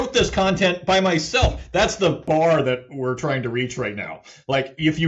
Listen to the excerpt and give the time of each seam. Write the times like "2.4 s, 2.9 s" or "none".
2.2 s